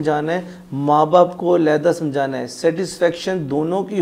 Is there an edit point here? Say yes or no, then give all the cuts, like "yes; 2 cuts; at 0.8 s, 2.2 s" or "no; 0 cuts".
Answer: no; 0 cuts